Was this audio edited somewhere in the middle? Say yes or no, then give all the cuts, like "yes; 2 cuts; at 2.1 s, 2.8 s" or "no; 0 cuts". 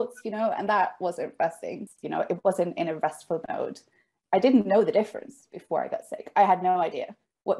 yes; 1 cut; at 1.8 s